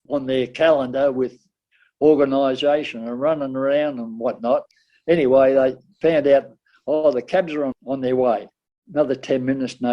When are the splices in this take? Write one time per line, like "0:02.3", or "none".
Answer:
0:07.7